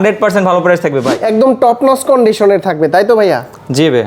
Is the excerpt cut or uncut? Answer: cut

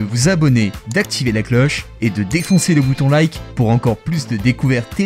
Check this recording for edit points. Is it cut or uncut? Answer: uncut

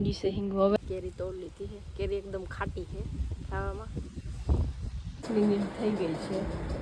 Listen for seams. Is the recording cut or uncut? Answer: cut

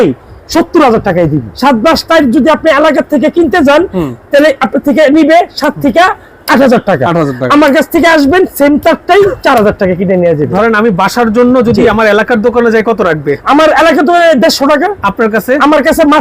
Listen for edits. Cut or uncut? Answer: cut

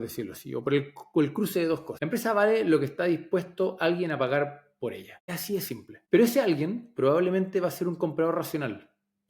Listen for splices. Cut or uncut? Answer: cut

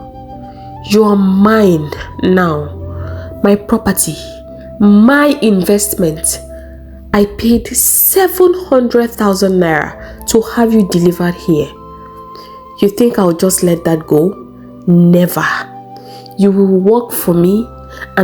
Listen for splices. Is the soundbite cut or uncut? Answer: uncut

